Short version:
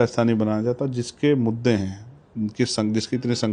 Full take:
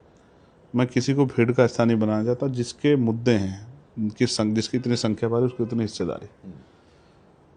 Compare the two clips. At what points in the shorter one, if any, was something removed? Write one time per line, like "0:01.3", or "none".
none